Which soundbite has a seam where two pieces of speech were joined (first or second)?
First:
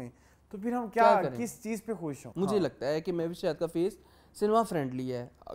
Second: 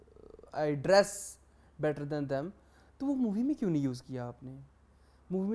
first